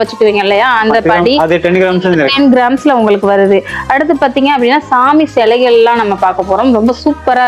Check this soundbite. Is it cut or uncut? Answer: uncut